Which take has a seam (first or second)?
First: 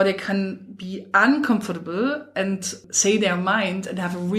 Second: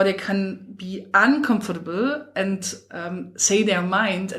first